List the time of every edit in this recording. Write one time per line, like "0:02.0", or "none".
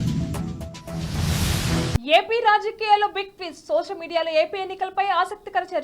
0:02.0